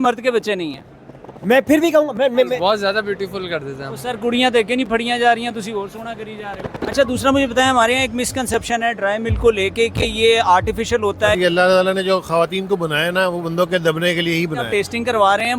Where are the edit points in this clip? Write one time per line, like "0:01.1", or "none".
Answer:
0:02.6
0:06.7
0:11.4
0:14.7